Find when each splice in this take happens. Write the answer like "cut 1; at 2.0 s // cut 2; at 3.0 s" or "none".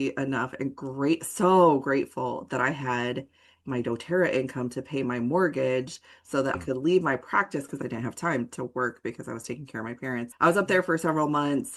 cut 1; at 6.6 s // cut 2; at 7.8 s // cut 3; at 10.3 s